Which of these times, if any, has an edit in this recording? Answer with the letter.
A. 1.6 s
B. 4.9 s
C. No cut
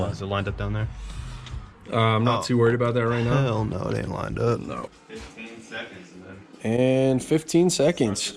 B